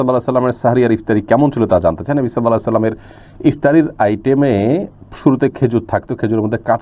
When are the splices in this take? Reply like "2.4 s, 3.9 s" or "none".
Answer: none